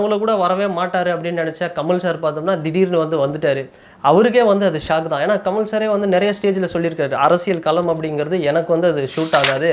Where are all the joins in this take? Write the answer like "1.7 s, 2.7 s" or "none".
none